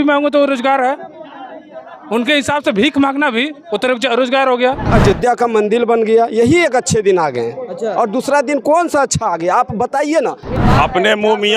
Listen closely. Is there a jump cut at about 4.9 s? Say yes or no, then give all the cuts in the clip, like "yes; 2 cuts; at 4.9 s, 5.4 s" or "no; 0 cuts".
yes; 2 cuts; at 4.9 s, 10.6 s